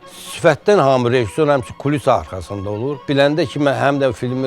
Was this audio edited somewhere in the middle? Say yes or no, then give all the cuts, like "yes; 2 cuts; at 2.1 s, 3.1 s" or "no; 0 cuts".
yes; 1 cut; at 3.0 s